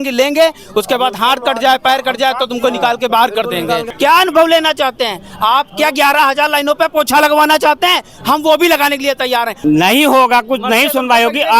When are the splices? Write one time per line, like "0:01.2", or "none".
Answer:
0:03.9
0:09.5

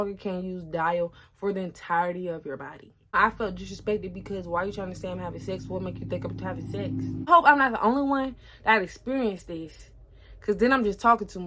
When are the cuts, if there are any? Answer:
0:03.0
0:07.3

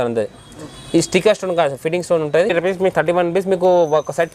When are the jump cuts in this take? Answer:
0:02.5

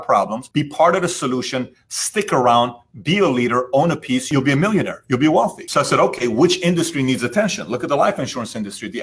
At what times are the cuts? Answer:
0:04.3

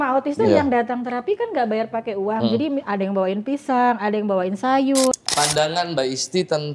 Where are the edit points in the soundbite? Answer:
0:05.2

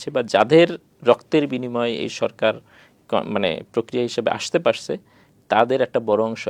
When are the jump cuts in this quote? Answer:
none

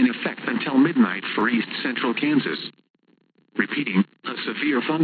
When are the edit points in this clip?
0:01.4

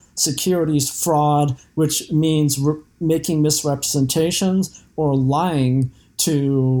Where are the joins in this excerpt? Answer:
none

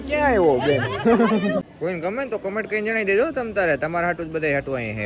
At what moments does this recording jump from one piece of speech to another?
0:01.6

